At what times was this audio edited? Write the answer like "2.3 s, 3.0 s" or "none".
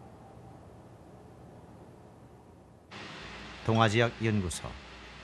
2.3 s